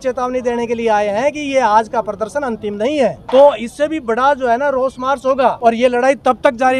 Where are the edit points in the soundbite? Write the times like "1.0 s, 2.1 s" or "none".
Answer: 3.2 s, 5.6 s